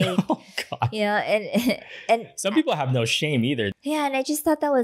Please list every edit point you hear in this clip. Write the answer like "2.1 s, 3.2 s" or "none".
3.7 s